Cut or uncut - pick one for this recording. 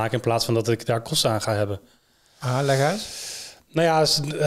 uncut